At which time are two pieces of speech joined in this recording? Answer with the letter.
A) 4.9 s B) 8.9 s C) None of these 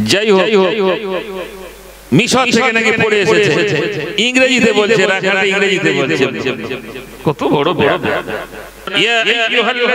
B